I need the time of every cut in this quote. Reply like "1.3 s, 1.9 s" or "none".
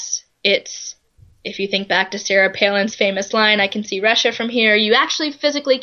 none